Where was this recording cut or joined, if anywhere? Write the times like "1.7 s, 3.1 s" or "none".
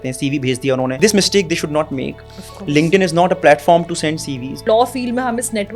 0.9 s, 4.6 s